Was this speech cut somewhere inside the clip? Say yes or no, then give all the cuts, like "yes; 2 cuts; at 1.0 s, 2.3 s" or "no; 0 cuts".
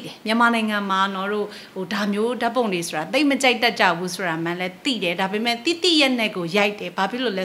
no; 0 cuts